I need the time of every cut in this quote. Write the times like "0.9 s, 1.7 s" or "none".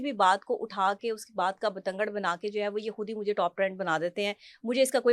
none